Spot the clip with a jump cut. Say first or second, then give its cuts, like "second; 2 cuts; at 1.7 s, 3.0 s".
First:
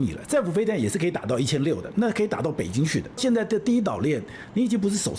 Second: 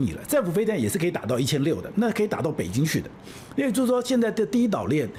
first; 1 cut; at 3.2 s